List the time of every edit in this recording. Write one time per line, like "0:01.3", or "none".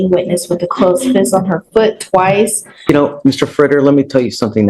0:02.9